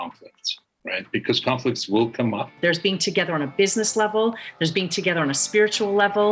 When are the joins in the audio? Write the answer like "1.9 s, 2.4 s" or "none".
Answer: 2.5 s